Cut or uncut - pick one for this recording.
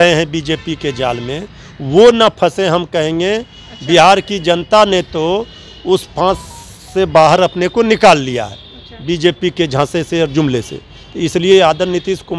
uncut